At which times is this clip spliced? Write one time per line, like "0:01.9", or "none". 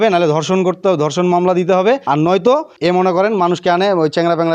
0:02.0
0:02.7